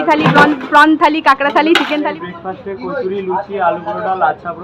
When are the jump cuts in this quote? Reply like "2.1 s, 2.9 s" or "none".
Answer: 2.1 s